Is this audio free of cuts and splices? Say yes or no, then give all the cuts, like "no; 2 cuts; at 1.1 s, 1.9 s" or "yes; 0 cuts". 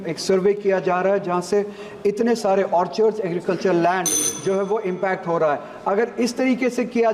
yes; 0 cuts